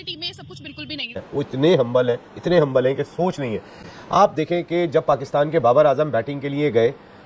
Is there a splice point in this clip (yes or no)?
yes